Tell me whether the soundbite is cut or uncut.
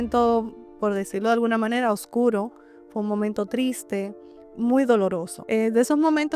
cut